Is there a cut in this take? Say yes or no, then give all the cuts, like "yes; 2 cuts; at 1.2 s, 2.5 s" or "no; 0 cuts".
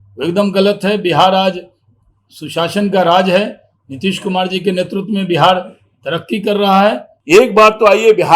yes; 1 cut; at 7.1 s